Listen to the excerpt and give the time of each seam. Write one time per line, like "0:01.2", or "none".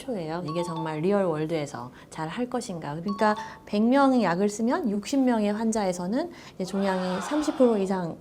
0:03.0